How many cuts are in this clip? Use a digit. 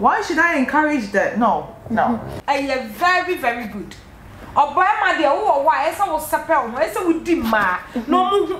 1